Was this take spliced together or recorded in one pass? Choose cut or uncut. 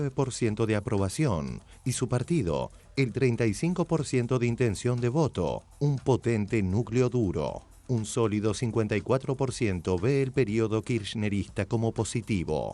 uncut